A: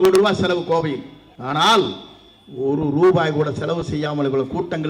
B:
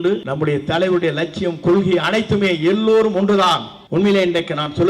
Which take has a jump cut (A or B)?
B